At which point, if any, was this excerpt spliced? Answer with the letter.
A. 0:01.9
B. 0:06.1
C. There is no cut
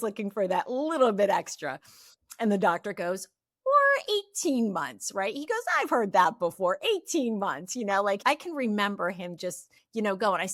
C